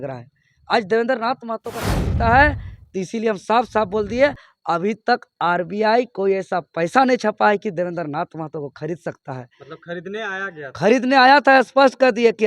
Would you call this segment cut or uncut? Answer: cut